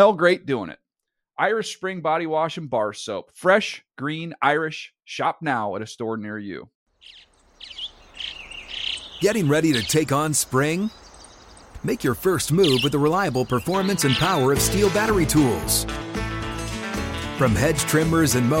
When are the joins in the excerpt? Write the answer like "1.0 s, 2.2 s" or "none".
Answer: 6.8 s